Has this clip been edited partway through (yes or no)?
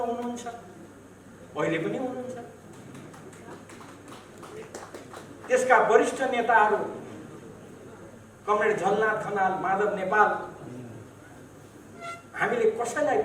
no